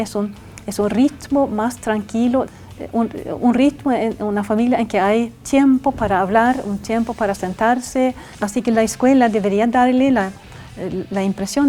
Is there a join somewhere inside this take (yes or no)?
yes